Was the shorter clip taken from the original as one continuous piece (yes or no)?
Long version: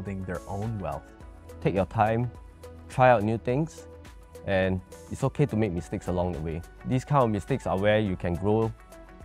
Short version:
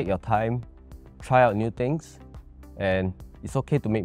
yes